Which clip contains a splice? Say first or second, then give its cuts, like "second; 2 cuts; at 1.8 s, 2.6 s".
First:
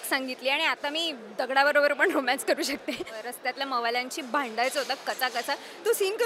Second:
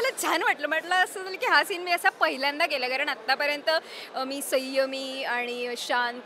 first; 1 cut; at 3.3 s